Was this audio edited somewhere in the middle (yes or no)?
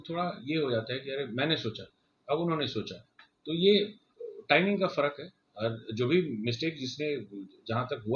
no